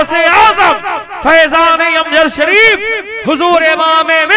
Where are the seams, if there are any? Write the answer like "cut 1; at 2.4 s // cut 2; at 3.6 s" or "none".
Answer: none